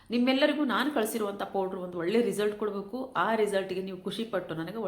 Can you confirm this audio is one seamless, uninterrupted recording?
yes; 0 cuts

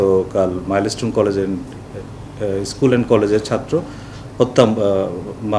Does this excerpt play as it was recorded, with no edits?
yes; 0 cuts

